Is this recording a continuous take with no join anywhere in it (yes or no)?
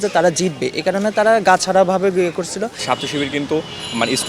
no